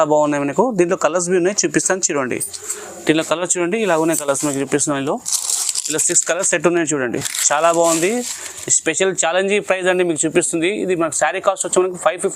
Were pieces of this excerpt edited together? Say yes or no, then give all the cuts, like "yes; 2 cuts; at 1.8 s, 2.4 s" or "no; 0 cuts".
no; 0 cuts